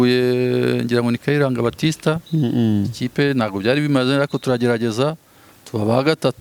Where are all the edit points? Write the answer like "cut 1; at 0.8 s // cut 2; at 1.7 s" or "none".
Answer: none